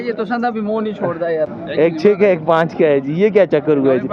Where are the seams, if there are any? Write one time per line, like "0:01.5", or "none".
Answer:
0:01.5